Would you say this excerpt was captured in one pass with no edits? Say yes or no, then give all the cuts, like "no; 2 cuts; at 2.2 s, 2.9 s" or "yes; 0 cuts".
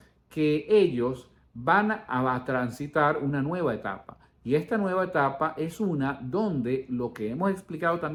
yes; 0 cuts